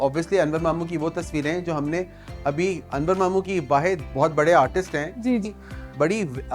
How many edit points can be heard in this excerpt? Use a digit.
1